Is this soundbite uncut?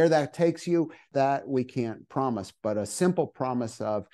no; 1 cut; at 1.1 s

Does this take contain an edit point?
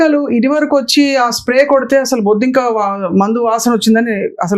no; 0 cuts

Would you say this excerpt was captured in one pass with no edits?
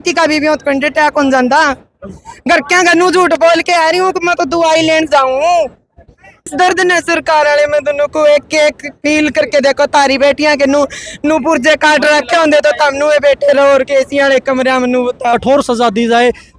no; 2 cuts; at 6.5 s, 15.3 s

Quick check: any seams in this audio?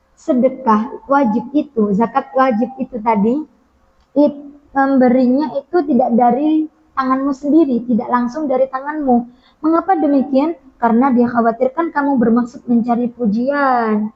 no; 0 cuts

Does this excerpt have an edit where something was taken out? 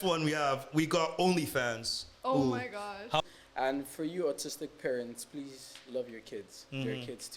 yes; 1 cut; at 3.2 s

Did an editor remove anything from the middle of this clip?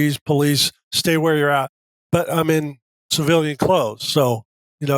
no; 0 cuts

